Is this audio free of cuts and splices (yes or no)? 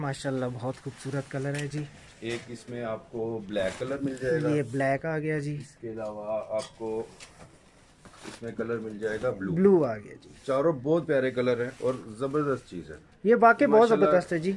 yes